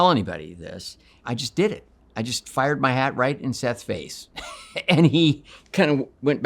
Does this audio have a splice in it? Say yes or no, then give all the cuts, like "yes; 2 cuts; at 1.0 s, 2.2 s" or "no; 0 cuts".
yes; 1 cut; at 1.2 s